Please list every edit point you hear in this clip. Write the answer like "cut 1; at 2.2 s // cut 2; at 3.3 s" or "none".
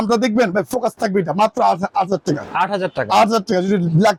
none